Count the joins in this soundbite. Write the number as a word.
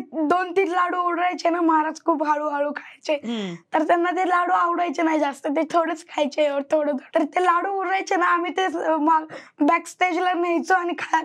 zero